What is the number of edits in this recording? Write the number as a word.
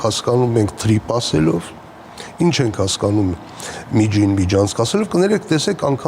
zero